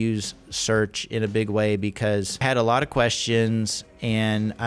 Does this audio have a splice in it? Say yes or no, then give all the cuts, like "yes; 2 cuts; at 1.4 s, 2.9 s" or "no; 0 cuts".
yes; 1 cut; at 2.3 s